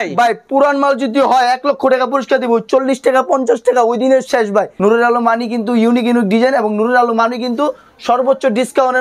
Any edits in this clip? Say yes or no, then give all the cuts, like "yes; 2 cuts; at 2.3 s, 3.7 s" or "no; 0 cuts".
yes; 1 cut; at 4.7 s